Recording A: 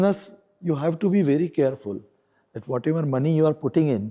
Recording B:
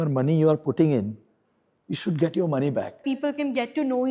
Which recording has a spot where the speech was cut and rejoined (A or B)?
B